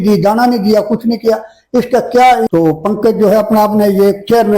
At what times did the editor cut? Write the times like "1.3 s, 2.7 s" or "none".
2.5 s